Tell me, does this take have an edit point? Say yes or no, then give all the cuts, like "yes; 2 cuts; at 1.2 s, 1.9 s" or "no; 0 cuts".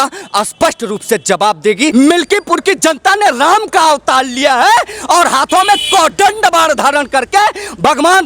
yes; 1 cut; at 1.9 s